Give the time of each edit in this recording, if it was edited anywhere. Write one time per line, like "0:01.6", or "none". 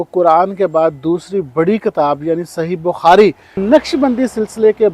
0:03.6